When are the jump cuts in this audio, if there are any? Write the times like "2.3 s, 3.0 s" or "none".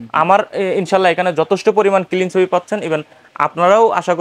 none